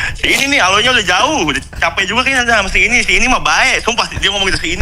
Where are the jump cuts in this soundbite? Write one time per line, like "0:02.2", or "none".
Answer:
none